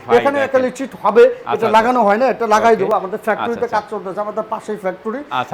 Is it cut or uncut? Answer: uncut